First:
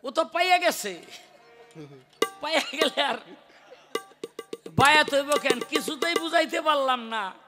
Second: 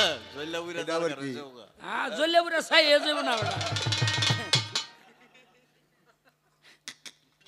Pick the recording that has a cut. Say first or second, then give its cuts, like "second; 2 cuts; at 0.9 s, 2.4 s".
second; 1 cut; at 4.7 s